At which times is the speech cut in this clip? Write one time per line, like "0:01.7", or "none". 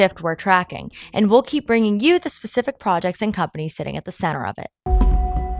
0:04.7